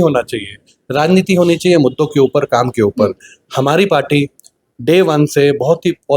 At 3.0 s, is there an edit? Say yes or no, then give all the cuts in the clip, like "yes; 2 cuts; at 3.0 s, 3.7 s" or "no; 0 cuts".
no; 0 cuts